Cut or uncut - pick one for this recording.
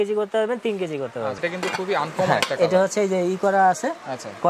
cut